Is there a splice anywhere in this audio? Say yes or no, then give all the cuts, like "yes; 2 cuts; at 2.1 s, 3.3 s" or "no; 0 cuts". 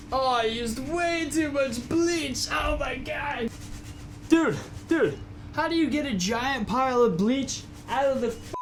no; 0 cuts